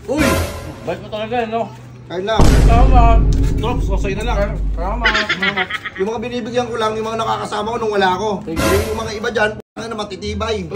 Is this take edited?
no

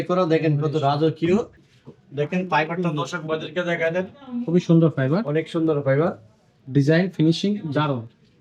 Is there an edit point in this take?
yes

